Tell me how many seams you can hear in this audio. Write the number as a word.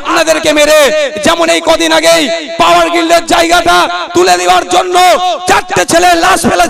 zero